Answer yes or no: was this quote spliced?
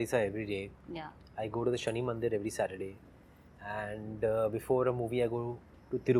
no